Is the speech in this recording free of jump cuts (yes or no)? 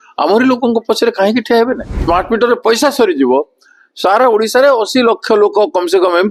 no